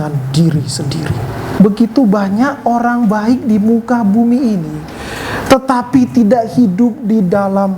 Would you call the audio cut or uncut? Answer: cut